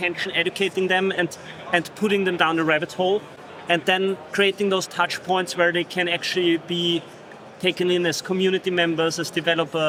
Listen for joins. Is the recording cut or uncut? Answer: uncut